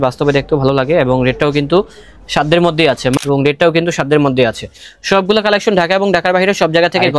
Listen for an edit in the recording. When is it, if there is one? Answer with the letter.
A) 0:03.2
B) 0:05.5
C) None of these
A